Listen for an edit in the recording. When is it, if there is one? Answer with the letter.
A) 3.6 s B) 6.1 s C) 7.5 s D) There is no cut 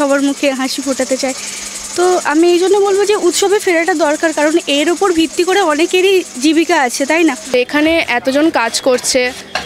C